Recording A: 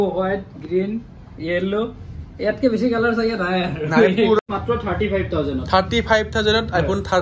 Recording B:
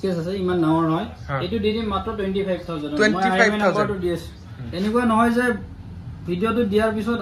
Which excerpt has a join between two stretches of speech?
A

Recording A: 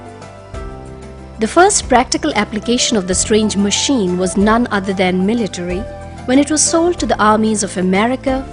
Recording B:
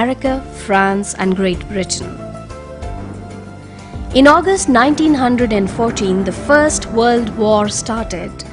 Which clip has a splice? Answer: A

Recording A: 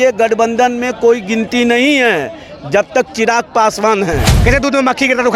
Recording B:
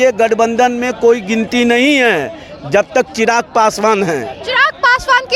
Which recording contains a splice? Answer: A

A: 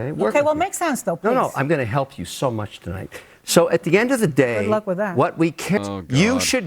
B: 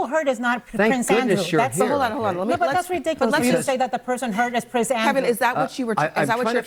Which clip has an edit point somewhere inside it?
A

